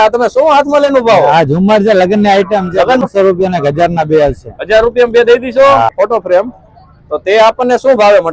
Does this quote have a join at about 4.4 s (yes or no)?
no